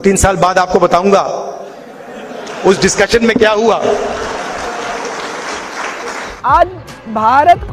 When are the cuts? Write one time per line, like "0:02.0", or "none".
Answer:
0:06.3